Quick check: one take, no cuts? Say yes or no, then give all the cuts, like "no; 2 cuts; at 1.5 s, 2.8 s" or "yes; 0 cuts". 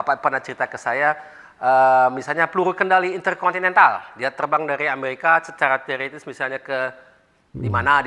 yes; 0 cuts